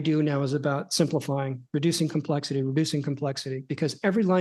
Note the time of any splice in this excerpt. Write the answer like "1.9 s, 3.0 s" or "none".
none